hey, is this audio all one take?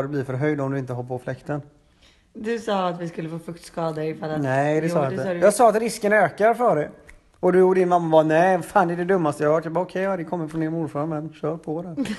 yes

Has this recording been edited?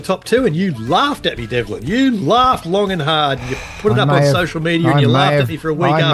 no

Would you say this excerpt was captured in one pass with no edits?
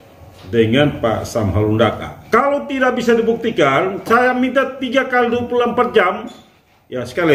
no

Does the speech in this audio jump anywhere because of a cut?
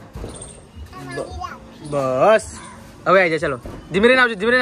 no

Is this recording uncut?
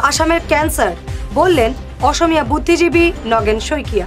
yes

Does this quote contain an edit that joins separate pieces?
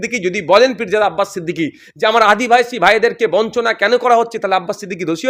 no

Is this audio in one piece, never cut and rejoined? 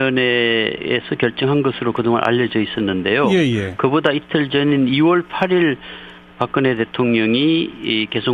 no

